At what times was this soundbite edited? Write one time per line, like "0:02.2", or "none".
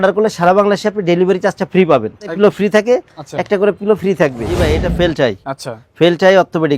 0:02.3
0:04.6